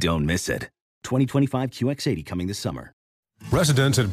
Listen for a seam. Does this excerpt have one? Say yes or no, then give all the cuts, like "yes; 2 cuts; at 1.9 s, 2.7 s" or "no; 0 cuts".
yes; 1 cut; at 3.1 s